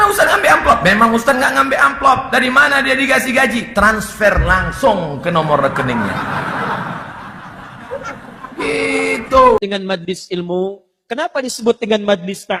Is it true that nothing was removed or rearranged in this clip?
no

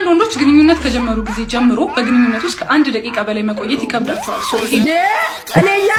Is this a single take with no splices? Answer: yes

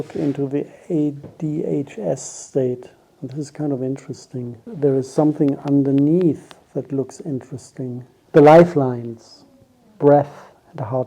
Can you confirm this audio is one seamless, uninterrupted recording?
no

